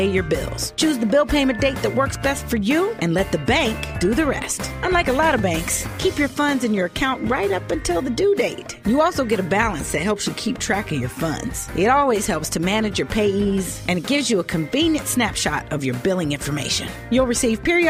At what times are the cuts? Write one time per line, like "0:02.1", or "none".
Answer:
none